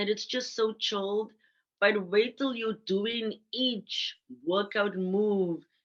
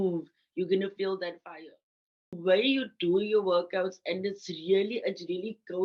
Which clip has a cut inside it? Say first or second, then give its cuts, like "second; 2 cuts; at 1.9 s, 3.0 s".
second; 1 cut; at 2.4 s